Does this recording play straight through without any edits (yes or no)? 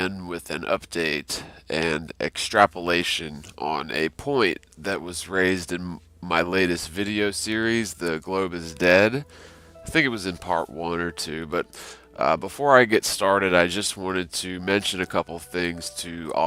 yes